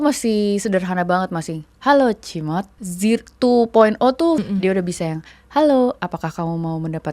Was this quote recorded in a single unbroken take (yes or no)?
no